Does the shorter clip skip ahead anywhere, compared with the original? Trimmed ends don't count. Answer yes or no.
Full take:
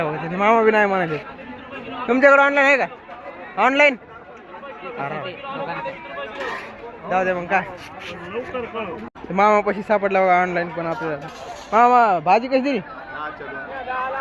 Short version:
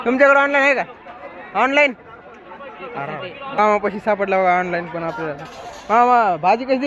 yes